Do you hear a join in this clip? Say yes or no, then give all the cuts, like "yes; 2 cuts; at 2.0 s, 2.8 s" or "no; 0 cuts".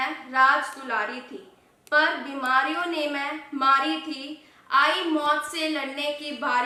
no; 0 cuts